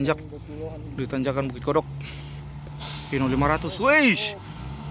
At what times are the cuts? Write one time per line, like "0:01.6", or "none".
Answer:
none